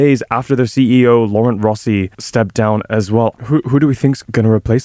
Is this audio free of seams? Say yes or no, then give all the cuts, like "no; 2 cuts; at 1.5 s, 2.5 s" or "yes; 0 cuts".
no; 1 cut; at 3.4 s